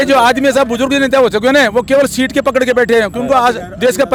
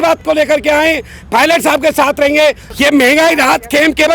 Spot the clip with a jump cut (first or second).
second